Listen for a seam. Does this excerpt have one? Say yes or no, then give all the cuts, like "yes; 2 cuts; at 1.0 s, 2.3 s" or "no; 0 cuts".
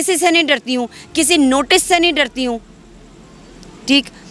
no; 0 cuts